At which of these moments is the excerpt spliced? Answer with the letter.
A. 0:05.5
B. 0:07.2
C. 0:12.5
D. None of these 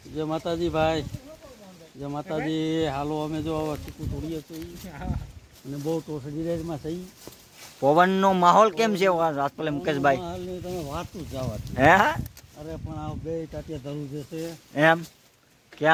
D